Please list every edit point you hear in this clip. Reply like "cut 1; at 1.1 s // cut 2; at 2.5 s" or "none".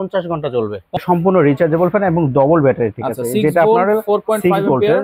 cut 1; at 1.0 s